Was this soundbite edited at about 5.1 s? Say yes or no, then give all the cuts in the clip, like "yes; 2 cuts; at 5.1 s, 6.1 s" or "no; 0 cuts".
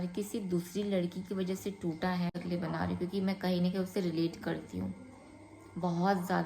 no; 1 cut; at 2.4 s